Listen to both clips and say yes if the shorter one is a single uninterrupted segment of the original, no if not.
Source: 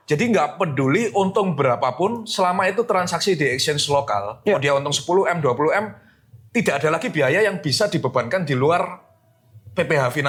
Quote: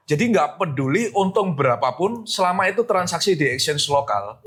yes